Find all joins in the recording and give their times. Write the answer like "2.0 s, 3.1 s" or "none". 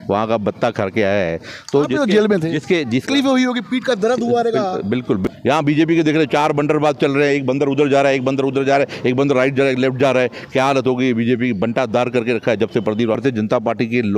3.1 s, 5.2 s, 13.2 s